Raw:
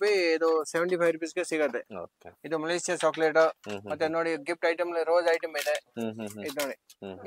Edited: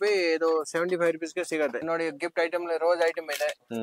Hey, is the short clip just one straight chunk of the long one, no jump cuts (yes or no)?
no